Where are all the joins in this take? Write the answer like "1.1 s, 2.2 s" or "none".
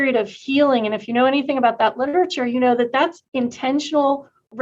3.2 s